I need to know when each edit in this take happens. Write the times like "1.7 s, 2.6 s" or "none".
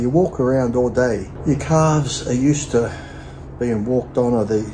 1.3 s